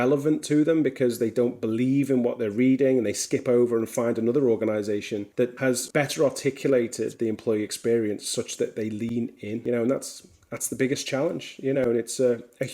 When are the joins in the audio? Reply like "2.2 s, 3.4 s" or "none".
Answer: 5.7 s, 9.6 s